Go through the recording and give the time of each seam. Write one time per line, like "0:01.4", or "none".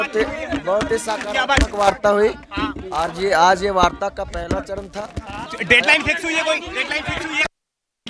0:05.4